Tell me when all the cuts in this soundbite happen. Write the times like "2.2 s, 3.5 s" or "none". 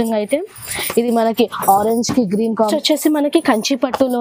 2.7 s